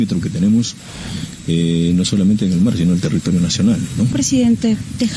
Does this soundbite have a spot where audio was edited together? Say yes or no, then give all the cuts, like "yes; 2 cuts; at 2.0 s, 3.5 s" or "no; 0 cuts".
yes; 1 cut; at 4.1 s